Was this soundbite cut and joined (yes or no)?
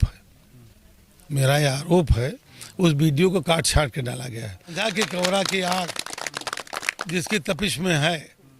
yes